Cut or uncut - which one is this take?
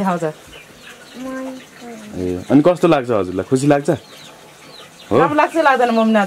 uncut